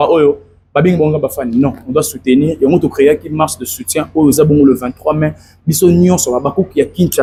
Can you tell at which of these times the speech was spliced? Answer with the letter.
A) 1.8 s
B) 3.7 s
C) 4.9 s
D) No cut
D